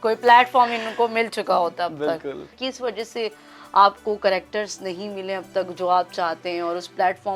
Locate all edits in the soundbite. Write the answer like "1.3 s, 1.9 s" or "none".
2.6 s